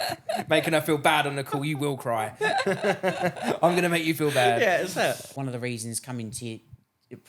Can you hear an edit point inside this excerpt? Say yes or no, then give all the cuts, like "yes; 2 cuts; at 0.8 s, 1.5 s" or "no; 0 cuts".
yes; 1 cut; at 5.3 s